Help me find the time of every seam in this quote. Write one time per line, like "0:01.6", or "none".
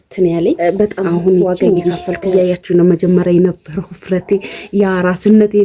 0:01.9